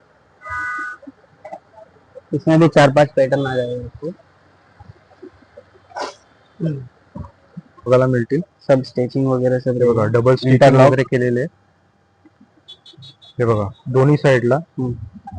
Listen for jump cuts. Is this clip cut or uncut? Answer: cut